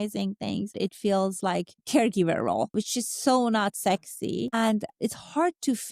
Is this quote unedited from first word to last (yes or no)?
no